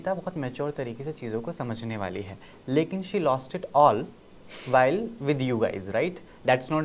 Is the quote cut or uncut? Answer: uncut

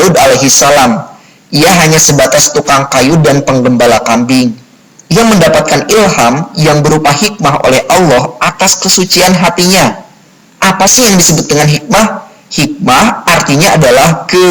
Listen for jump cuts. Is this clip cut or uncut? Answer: uncut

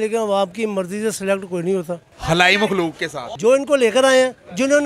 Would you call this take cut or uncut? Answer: cut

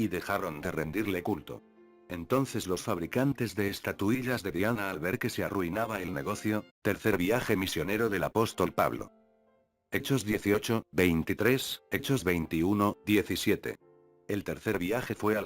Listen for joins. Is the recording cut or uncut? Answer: uncut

